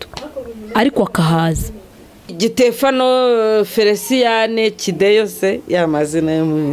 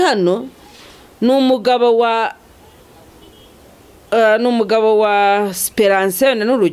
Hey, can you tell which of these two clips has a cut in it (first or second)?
first